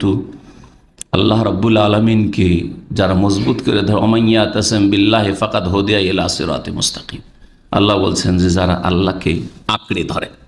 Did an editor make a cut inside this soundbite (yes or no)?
no